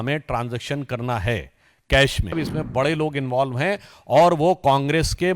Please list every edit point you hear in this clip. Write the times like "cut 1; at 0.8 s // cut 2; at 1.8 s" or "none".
cut 1; at 2.4 s